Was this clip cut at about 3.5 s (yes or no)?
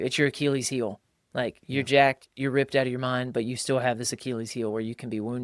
no